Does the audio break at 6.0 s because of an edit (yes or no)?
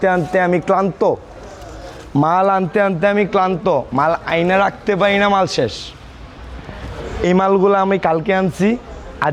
no